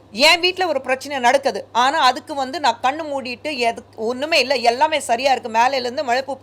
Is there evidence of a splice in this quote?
no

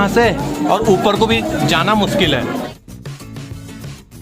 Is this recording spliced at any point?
yes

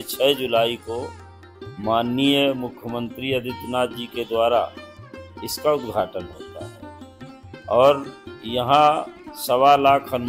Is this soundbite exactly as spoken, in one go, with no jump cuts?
yes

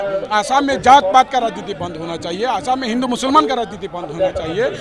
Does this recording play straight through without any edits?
yes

